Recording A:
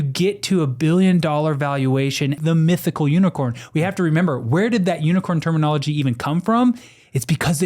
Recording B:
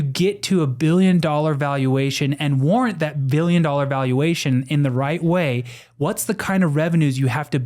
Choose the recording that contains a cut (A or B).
A